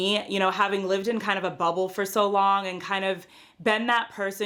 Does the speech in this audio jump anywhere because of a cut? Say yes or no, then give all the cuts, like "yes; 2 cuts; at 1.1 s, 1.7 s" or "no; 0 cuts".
no; 0 cuts